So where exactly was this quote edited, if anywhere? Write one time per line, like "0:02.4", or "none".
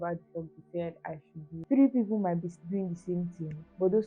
0:01.6